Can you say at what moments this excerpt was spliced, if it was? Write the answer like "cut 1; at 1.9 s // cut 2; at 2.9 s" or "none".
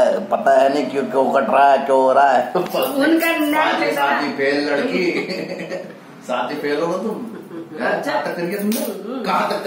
none